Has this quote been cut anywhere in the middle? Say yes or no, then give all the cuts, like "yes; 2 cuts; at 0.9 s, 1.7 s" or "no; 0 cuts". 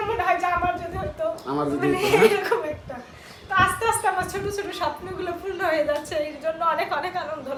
no; 0 cuts